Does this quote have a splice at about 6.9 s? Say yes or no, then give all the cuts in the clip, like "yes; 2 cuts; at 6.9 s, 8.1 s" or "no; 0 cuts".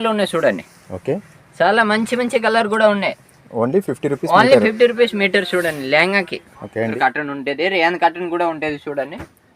yes; 1 cut; at 6.9 s